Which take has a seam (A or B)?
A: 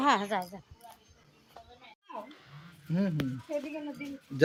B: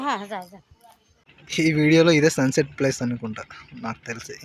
B